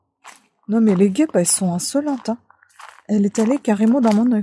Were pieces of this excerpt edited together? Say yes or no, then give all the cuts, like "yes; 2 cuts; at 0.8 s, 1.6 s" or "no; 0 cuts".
no; 0 cuts